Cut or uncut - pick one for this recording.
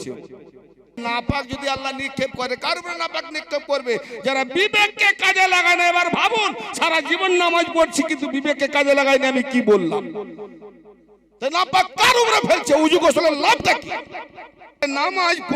cut